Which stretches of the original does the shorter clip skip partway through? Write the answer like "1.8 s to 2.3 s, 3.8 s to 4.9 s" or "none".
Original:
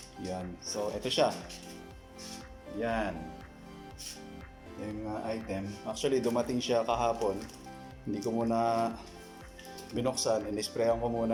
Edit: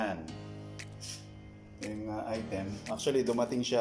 none